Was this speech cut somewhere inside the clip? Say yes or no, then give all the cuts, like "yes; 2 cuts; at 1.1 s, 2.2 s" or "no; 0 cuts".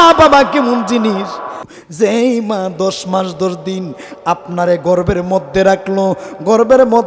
yes; 1 cut; at 1.7 s